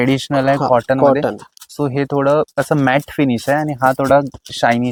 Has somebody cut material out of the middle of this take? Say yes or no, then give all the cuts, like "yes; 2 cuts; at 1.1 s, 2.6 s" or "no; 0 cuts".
no; 0 cuts